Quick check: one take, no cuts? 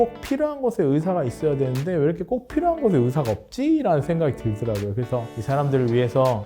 no; 1 cut; at 5.3 s

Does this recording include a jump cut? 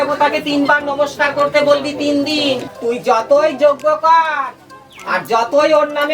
yes; 1 cut; at 2.7 s

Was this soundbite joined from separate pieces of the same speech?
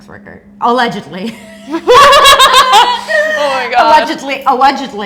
no; 0 cuts

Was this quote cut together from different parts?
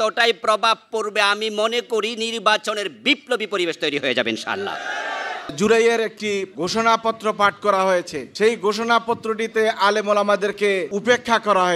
yes; 4 cuts; at 5.5 s, 6.5 s, 8.2 s, 10.9 s

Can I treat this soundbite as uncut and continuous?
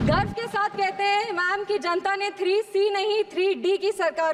yes; 0 cuts

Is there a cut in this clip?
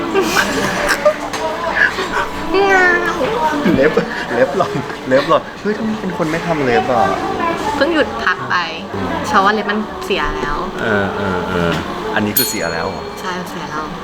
no; 0 cuts

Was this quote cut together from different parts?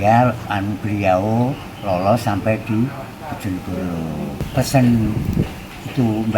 yes; 1 cut; at 4.5 s

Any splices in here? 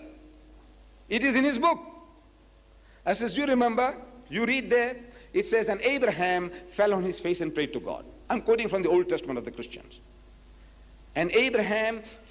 no; 0 cuts

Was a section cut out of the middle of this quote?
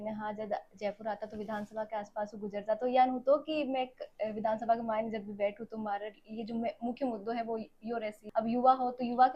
no; 0 cuts

